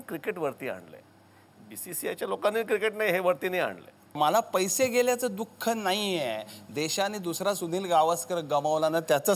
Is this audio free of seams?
no; 1 cut; at 4.2 s

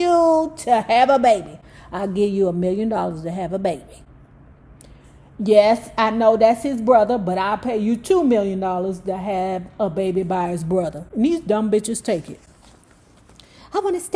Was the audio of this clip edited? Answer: no; 0 cuts

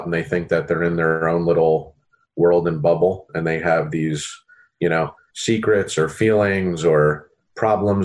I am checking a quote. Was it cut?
no; 0 cuts

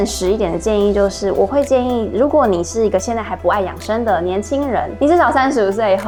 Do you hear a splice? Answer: no; 0 cuts

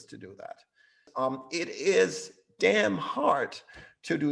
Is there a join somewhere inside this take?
yes; 1 cut; at 1.0 s

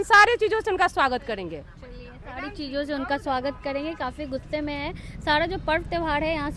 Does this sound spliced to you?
no; 0 cuts

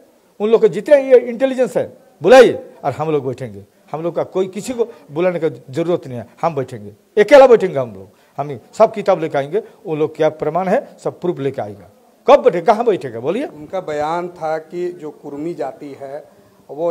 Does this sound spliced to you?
no; 0 cuts

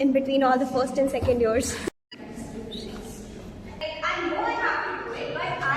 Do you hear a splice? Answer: yes; 2 cuts; at 1.9 s, 3.7 s

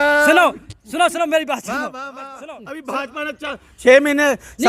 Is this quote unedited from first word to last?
no; 1 cut; at 2.3 s

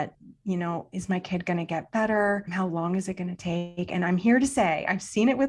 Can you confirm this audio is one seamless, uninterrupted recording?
yes; 0 cuts

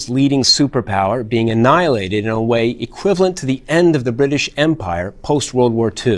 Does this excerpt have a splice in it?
yes; 1 cut; at 3.6 s

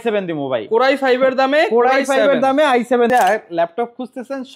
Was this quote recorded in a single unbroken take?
no; 1 cut; at 3.1 s

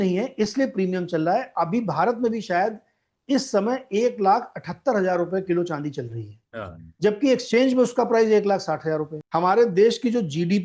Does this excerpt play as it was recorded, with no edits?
no; 1 cut; at 9.2 s

